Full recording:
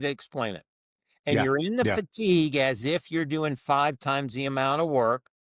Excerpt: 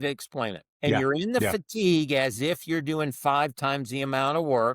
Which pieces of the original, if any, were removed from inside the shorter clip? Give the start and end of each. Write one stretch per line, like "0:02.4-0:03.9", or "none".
0:01.0-0:01.4